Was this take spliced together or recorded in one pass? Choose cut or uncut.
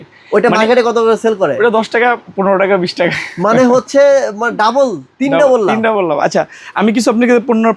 uncut